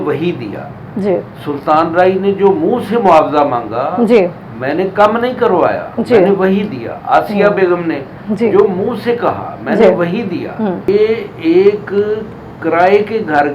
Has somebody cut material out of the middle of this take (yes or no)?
yes